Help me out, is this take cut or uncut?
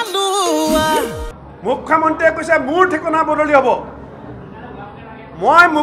cut